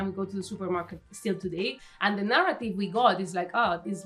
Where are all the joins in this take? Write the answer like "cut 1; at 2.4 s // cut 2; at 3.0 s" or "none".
cut 1; at 1.9 s